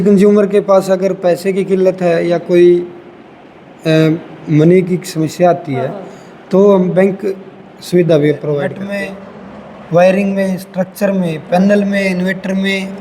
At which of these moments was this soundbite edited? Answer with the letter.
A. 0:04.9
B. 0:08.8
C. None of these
B